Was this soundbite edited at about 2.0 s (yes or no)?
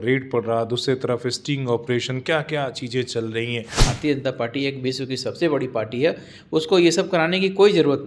no